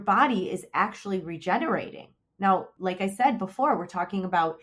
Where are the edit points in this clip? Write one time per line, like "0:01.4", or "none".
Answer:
0:02.7